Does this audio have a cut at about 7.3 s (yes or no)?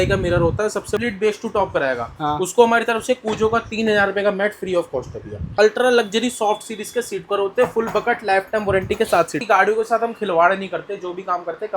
no